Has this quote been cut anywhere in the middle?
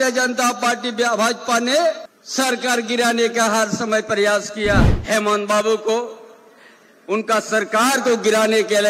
yes; 2 cuts; at 2.1 s, 4.9 s

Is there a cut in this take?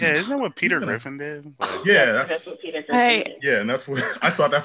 no; 0 cuts

